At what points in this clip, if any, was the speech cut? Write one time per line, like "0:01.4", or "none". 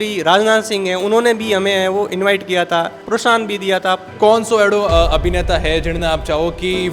0:03.0
0:04.1